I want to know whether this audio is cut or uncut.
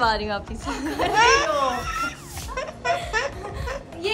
cut